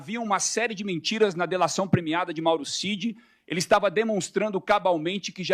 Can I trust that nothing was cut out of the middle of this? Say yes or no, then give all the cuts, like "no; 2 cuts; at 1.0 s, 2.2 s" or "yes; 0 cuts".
yes; 0 cuts